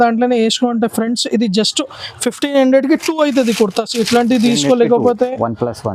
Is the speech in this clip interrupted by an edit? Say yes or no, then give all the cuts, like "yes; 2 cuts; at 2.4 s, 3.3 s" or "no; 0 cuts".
no; 0 cuts